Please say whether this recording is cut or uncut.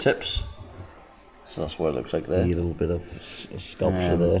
cut